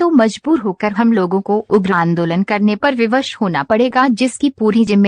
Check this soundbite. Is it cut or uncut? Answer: cut